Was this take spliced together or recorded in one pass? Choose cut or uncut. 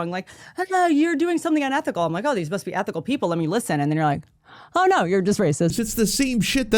cut